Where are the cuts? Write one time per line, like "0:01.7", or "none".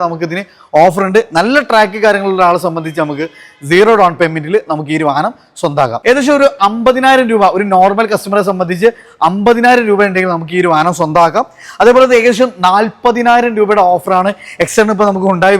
0:06.0